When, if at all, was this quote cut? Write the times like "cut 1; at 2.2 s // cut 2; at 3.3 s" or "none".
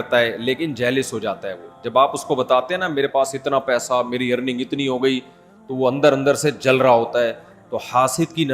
none